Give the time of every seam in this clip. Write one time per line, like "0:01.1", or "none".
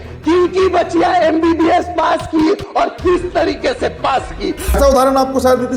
0:04.8